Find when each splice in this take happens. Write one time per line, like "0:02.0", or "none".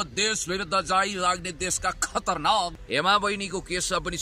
0:02.8